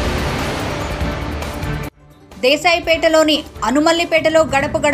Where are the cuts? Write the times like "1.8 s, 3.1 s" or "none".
2.1 s